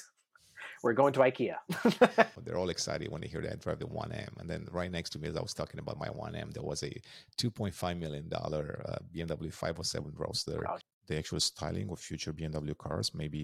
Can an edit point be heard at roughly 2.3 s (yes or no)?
yes